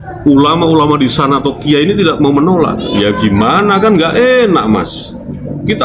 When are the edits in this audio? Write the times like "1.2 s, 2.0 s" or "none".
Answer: none